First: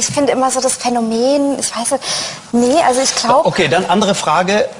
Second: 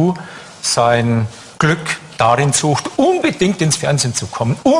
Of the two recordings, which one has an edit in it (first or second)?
second